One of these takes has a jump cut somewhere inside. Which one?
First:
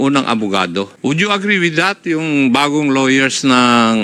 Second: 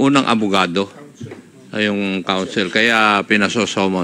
first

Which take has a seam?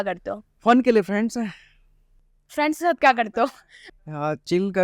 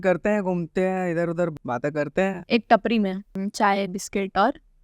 second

